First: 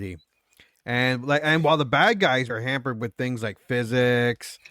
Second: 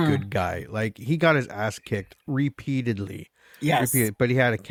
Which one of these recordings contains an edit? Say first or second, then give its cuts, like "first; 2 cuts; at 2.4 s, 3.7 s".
first; 1 cut; at 2.5 s